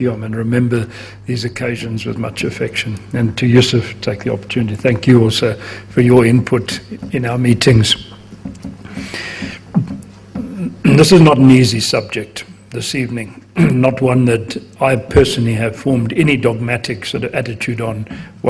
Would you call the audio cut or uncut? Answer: cut